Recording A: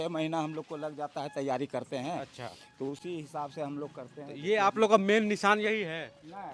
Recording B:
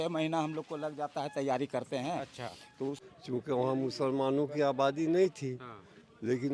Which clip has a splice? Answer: B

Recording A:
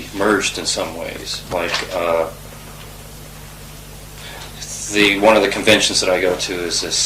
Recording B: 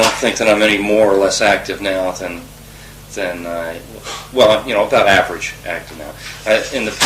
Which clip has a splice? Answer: A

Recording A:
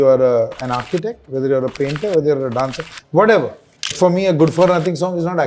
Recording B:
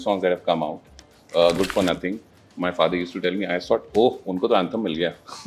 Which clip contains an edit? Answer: A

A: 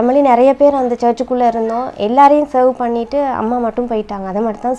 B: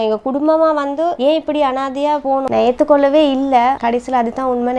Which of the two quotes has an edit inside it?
B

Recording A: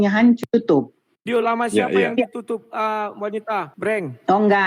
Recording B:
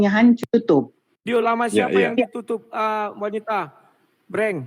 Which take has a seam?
A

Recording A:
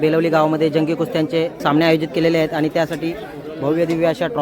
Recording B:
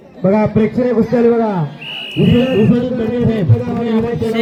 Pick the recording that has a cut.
A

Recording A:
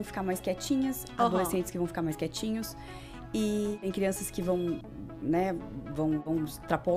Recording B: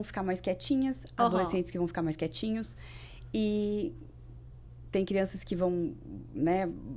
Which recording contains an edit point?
A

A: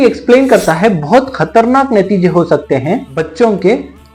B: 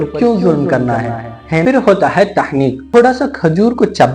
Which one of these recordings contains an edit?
B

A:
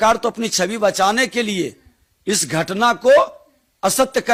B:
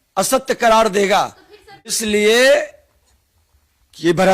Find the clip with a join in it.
B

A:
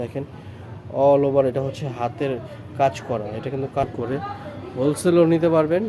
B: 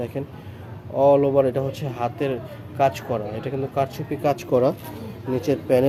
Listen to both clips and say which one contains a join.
A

